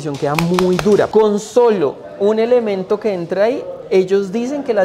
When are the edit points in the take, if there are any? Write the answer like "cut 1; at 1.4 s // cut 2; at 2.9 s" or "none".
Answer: cut 1; at 1.1 s